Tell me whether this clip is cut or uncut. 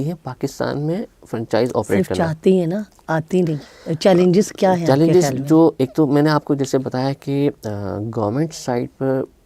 uncut